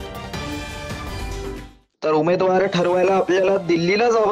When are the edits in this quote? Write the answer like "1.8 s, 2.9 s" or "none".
1.7 s